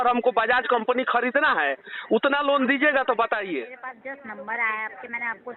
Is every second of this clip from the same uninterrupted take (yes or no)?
no